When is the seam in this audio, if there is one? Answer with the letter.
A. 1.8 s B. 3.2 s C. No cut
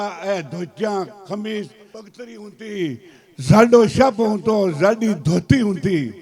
A